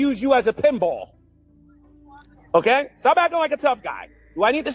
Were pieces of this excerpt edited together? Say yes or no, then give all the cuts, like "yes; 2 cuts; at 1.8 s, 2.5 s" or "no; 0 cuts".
no; 0 cuts